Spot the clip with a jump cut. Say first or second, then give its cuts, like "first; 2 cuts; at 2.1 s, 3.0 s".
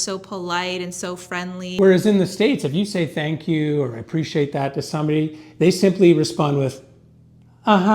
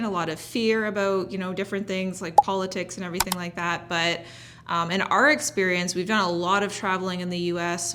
first; 1 cut; at 1.7 s